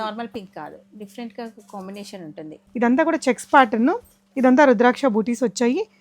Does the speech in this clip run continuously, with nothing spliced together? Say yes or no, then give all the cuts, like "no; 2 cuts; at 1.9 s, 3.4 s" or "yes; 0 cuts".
no; 1 cut; at 2.6 s